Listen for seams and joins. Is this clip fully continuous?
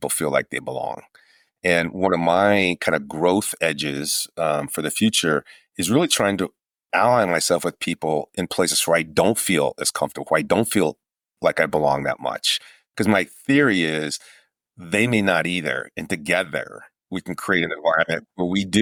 yes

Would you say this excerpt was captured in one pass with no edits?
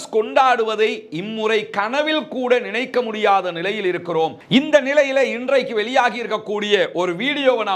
no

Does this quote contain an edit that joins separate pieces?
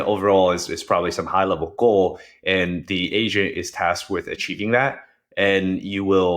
no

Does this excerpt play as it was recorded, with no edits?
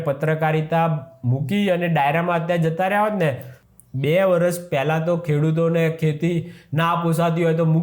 no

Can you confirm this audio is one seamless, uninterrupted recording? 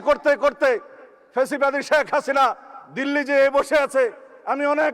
yes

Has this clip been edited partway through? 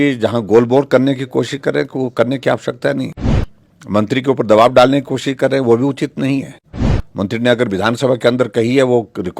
no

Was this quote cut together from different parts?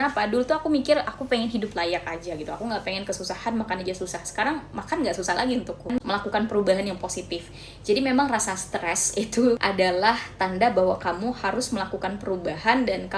yes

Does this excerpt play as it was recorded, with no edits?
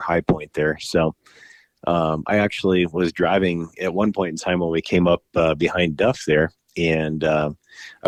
yes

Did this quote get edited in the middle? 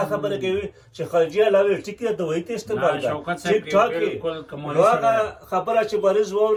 no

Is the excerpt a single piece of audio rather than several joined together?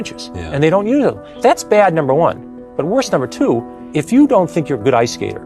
no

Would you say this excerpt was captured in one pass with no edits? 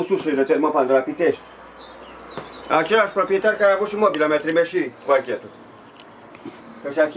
yes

